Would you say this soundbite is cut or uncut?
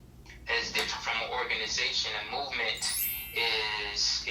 uncut